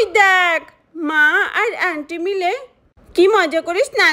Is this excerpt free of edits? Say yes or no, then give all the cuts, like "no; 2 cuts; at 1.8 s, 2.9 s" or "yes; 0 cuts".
yes; 0 cuts